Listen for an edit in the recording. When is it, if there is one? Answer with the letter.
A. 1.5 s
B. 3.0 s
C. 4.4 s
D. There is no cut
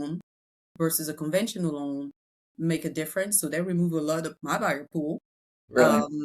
C